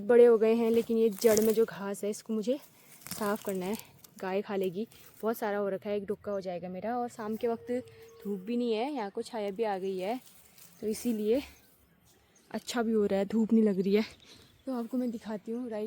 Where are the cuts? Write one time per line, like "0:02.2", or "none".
none

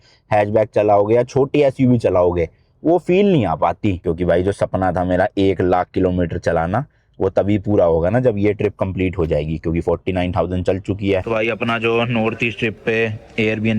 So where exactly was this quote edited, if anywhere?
0:04.1
0:11.2

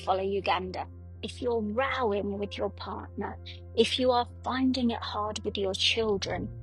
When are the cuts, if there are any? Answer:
0:01.1

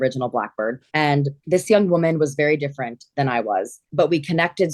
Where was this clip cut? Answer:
0:00.8
0:03.8

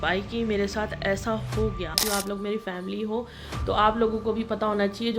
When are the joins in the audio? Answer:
0:02.0

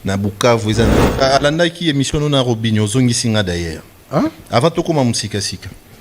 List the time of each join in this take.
0:01.0

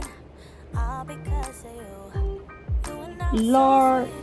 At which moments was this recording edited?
none

